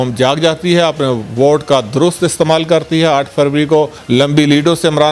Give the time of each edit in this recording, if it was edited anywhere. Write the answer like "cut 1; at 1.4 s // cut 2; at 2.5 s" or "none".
cut 1; at 4.0 s